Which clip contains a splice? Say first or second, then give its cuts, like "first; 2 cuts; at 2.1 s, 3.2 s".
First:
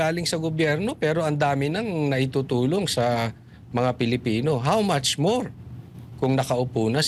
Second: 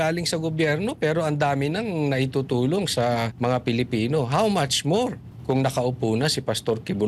second; 2 cuts; at 3.3 s, 5.3 s